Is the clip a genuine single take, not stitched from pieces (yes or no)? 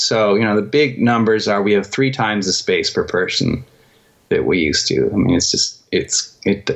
yes